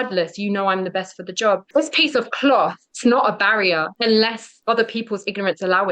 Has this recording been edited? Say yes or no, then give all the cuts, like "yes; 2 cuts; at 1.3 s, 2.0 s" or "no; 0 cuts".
yes; 4 cuts; at 1.7 s, 2.9 s, 3.9 s, 4.5 s